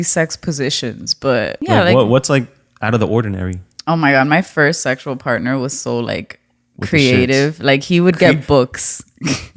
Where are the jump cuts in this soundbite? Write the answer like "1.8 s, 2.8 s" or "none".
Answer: 1.6 s